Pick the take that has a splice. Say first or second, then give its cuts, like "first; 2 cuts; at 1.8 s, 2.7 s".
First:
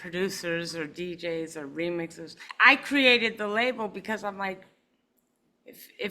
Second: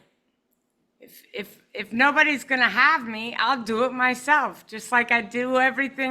first; 1 cut; at 2.4 s